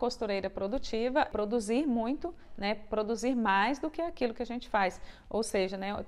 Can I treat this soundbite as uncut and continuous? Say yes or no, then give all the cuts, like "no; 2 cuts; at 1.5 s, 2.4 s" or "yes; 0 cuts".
no; 1 cut; at 1.3 s